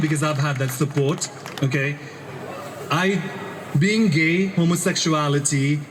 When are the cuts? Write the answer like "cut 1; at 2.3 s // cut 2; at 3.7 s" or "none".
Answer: none